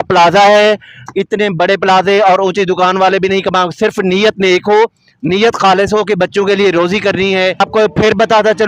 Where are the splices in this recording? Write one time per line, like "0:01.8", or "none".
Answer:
0:07.6